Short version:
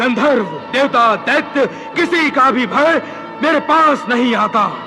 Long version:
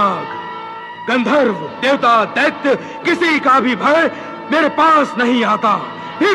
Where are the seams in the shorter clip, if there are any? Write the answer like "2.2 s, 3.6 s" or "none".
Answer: none